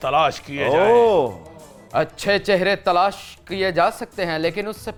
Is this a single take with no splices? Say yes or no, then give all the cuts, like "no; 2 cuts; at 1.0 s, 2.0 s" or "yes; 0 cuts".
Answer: yes; 0 cuts